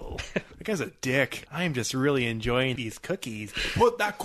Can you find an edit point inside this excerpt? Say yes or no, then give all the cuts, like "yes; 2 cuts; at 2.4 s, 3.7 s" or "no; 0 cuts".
yes; 2 cuts; at 1.5 s, 2.8 s